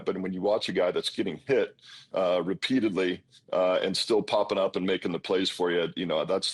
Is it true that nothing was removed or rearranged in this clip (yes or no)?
yes